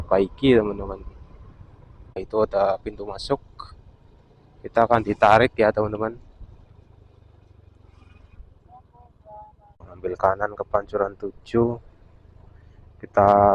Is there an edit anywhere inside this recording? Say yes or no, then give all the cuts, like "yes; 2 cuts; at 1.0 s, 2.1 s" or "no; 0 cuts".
yes; 2 cuts; at 2.2 s, 9.9 s